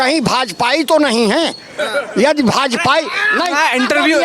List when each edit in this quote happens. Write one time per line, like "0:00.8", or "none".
none